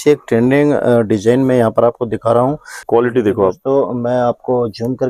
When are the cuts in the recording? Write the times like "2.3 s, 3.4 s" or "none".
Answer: 2.8 s